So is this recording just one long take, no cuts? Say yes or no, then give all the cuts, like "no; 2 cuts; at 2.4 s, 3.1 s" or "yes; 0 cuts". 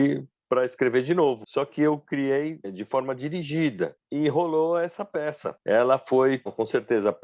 no; 4 cuts; at 1.4 s, 2.7 s, 4.0 s, 5.5 s